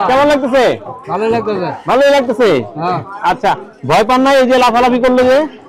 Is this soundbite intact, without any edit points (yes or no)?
yes